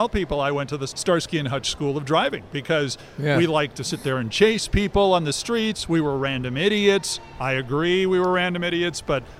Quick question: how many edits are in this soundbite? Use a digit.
0